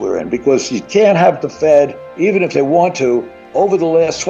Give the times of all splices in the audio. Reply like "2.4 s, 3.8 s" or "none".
2.0 s, 3.4 s